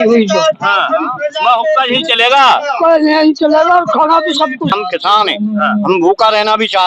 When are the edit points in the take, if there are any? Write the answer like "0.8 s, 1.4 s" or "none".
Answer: 4.7 s